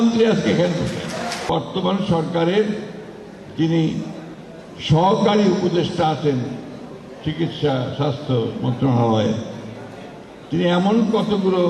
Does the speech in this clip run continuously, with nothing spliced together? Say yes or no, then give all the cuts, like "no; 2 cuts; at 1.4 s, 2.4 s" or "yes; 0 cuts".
no; 1 cut; at 1.5 s